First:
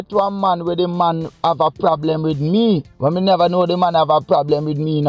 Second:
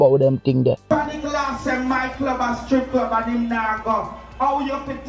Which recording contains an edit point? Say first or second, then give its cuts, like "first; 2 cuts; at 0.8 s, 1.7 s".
second; 1 cut; at 0.9 s